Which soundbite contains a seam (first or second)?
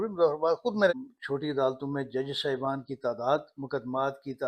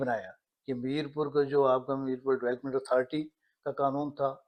first